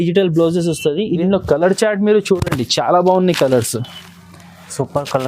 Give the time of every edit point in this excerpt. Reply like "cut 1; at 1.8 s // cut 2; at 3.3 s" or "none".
cut 1; at 1.2 s